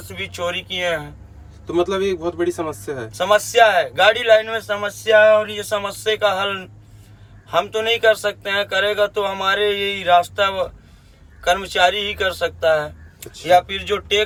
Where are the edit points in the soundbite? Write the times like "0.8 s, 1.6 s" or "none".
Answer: none